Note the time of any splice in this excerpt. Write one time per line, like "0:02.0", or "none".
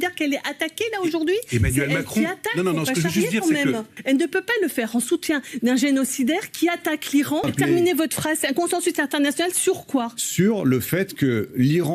0:03.9
0:07.5